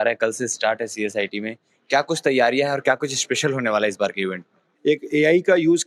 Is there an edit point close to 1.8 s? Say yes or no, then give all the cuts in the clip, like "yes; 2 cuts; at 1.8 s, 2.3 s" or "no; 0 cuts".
no; 1 cut; at 4.7 s